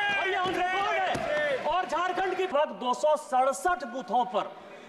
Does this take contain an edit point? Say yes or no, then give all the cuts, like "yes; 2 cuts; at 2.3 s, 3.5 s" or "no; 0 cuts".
yes; 1 cut; at 2.5 s